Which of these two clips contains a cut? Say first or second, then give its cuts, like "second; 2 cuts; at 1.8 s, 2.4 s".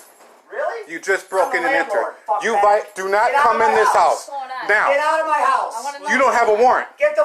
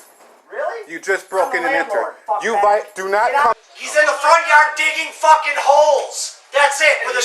second; 1 cut; at 3.5 s